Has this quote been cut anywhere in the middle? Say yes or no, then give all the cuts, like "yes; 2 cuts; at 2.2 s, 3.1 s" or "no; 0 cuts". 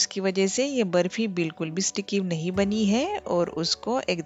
no; 0 cuts